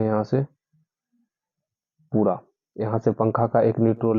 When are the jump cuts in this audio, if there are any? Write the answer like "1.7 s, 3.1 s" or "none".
none